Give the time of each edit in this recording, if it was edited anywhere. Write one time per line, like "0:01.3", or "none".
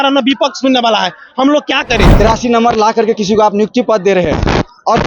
0:02.1